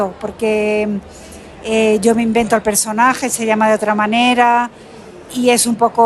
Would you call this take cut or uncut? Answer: uncut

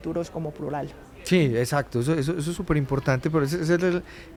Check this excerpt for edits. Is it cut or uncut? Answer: uncut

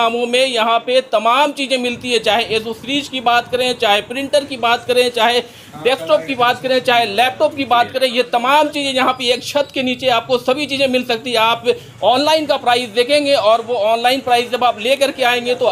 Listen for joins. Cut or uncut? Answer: uncut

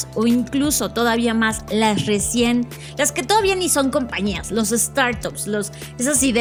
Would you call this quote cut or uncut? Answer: uncut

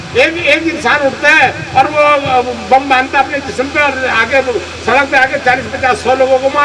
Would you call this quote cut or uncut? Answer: uncut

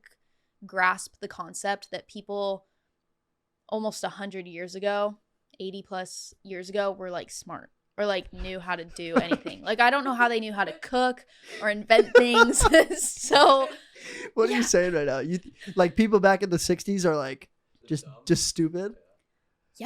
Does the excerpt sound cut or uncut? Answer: uncut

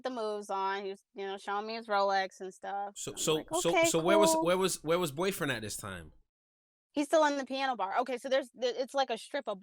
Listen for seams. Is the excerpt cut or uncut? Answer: uncut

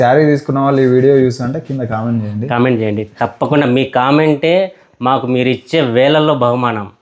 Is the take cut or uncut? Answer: uncut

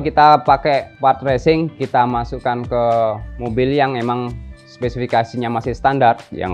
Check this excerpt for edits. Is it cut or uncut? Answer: uncut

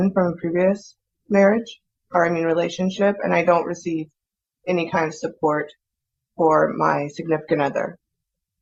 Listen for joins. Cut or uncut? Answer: uncut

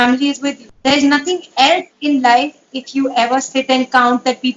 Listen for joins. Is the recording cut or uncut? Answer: uncut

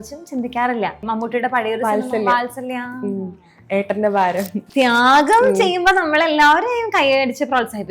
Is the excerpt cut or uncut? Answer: cut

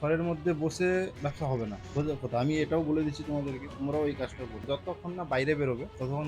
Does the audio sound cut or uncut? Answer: cut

